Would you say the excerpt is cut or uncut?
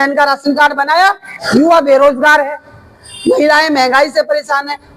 cut